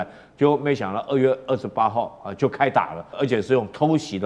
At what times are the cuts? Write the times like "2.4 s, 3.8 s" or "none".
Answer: 3.1 s